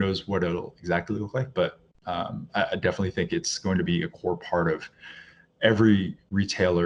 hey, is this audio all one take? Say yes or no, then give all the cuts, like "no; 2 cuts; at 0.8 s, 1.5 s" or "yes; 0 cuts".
yes; 0 cuts